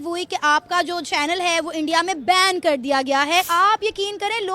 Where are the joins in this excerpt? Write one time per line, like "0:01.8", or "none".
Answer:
0:03.5